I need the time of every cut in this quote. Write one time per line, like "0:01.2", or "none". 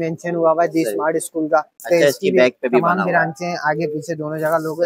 0:01.8